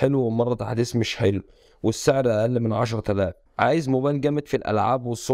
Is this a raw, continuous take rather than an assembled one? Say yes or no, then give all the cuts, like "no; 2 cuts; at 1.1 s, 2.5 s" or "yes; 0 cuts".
no; 1 cut; at 3.4 s